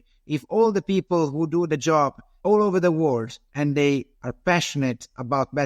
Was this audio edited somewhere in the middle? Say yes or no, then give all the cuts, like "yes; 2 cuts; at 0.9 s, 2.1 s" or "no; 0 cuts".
yes; 2 cuts; at 2.3 s, 3.9 s